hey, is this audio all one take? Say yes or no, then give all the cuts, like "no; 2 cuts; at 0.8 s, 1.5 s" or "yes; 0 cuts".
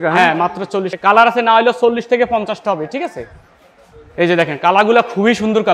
no; 1 cut; at 0.9 s